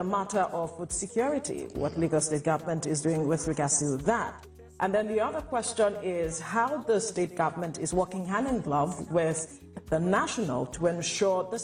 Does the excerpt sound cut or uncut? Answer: uncut